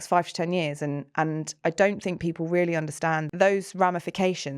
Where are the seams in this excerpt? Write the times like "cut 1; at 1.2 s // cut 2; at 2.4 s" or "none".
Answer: cut 1; at 3.3 s